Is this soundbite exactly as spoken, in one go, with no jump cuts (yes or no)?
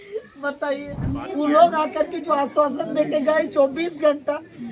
no